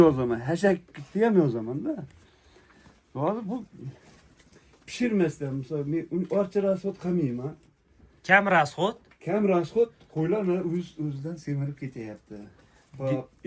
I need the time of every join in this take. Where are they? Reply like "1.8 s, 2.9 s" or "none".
none